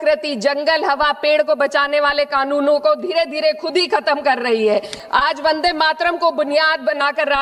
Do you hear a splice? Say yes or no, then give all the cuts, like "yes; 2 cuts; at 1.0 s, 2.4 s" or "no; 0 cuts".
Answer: yes; 1 cut; at 5.0 s